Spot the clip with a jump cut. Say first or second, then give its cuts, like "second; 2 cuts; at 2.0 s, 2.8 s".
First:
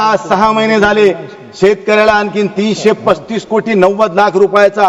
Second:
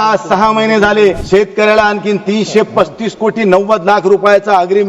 second; 1 cut; at 1.2 s